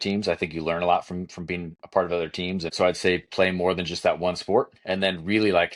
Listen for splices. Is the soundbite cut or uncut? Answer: cut